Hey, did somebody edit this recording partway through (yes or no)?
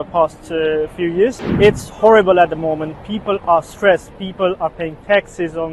yes